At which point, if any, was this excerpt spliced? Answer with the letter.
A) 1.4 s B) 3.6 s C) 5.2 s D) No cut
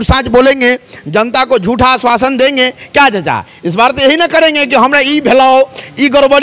D